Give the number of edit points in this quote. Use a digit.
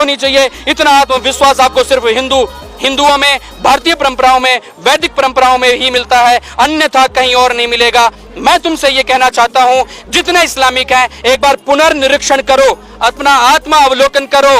0